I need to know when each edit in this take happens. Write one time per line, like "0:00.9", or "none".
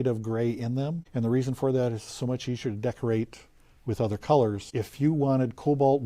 0:01.0
0:04.6